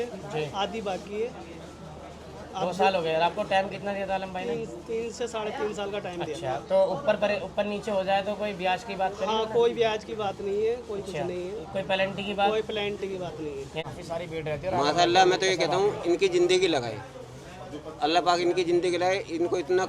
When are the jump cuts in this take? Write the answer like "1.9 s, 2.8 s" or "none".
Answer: 13.8 s